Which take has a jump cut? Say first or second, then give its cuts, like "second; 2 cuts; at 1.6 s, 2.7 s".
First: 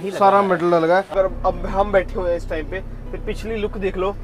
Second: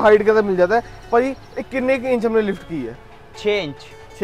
first; 1 cut; at 1.1 s